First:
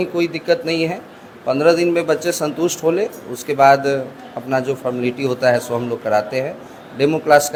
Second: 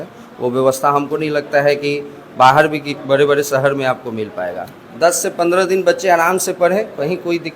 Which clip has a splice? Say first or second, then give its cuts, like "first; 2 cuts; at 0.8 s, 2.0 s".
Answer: second; 1 cut; at 4.8 s